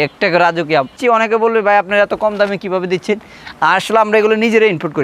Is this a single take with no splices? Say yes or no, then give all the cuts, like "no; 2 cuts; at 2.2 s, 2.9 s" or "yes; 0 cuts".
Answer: no; 1 cut; at 0.9 s